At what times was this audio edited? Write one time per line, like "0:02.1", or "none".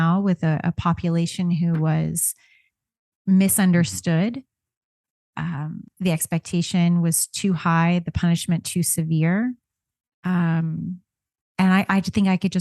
none